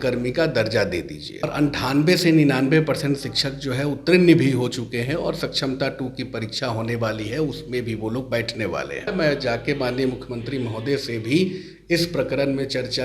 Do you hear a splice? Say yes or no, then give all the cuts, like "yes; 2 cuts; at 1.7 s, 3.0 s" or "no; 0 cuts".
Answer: yes; 2 cuts; at 1.4 s, 9.1 s